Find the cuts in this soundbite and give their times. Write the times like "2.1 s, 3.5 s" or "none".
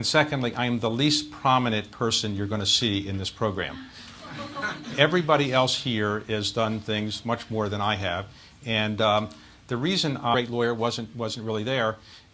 none